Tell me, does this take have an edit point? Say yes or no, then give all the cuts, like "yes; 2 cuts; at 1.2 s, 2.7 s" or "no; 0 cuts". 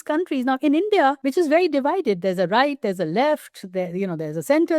yes; 1 cut; at 1.2 s